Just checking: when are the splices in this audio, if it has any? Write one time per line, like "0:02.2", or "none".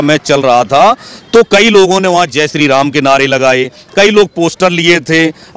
none

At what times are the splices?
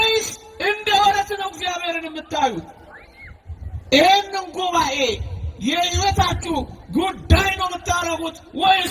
none

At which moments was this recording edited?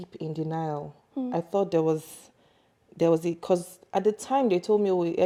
none

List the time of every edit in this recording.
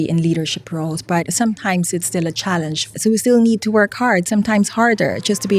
0:01.3
0:02.9

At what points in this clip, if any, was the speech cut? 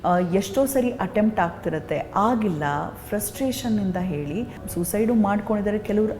0:04.6

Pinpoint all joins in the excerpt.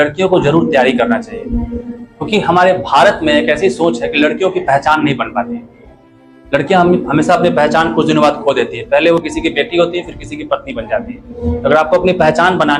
none

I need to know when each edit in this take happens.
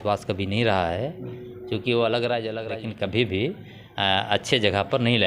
0:02.6

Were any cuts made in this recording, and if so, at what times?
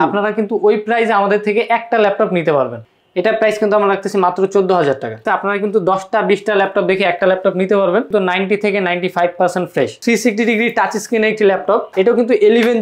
0:02.8
0:05.2
0:08.1
0:10.0
0:11.9

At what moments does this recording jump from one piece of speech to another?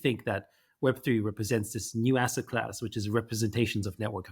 none

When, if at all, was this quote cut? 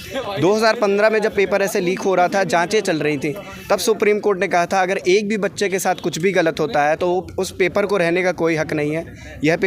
none

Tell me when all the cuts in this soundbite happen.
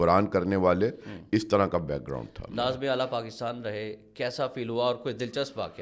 none

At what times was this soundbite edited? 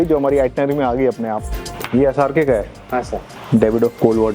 0:01.7
0:03.3

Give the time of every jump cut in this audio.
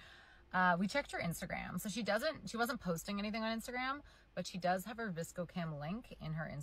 none

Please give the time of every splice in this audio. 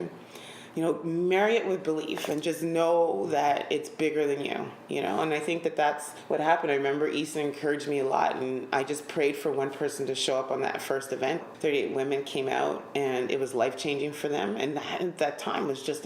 0:06.1
0:11.4

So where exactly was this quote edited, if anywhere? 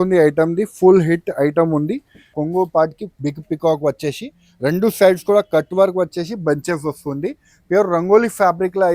0:02.4

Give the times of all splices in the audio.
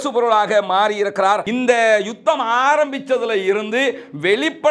0:01.4

